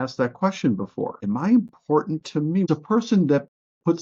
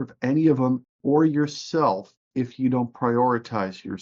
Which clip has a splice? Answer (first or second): first